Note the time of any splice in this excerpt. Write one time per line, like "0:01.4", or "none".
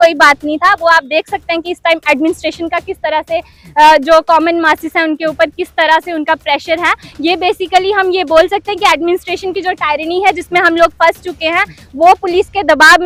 none